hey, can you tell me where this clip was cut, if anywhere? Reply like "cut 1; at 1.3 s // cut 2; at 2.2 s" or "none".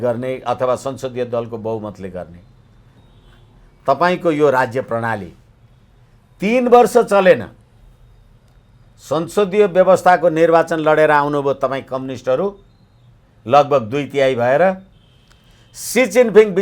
cut 1; at 3.0 s